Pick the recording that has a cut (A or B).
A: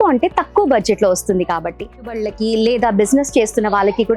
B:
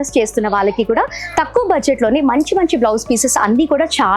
A